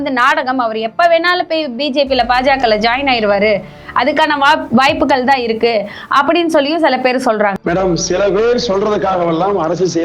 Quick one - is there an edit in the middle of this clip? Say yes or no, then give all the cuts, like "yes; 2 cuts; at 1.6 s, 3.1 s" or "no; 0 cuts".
yes; 1 cut; at 7.6 s